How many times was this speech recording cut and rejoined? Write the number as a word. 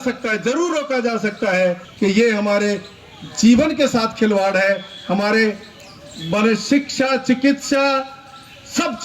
one